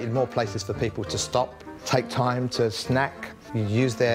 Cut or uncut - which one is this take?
cut